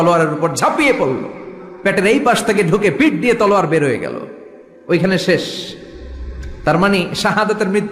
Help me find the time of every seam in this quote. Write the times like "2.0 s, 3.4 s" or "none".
none

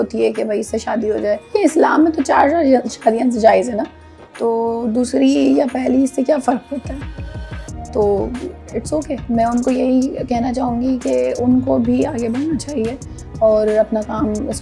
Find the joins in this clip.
1.4 s, 9.2 s

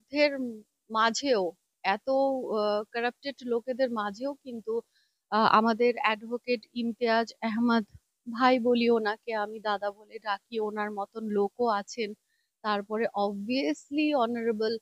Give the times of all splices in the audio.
none

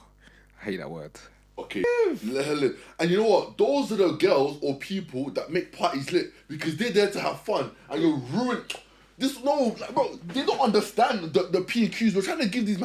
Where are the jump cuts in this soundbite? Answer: 1.8 s

